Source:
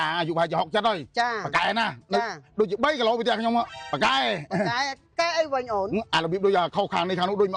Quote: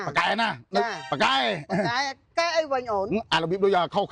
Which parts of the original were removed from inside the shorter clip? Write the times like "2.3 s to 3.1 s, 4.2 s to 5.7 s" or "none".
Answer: 2.4 s to 3.8 s